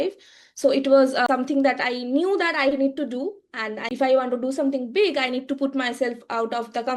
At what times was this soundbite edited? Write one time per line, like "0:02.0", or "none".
0:01.3
0:03.9

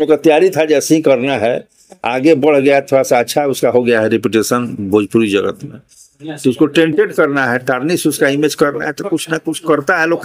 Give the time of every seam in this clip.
none

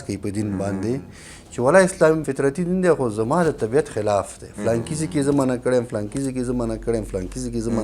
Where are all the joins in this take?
0:02.3

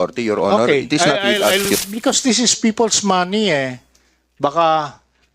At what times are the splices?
0:01.7

